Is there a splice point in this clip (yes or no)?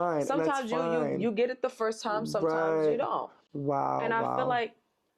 no